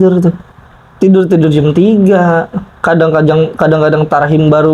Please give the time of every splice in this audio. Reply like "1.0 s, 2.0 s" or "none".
none